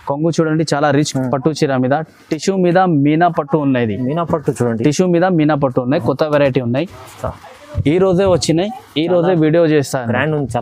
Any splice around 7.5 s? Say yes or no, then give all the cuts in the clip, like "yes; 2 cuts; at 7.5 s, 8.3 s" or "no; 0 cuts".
no; 1 cut; at 1.0 s